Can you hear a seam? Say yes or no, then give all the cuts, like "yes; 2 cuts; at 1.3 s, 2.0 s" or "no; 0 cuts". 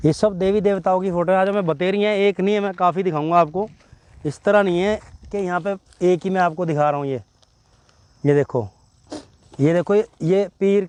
no; 0 cuts